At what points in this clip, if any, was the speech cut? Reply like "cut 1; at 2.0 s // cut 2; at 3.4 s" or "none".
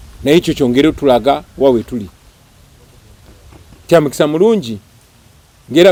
none